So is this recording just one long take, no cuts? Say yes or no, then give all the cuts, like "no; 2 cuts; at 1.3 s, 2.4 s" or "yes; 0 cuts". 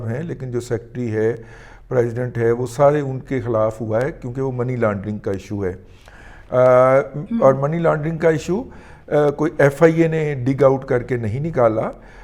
yes; 0 cuts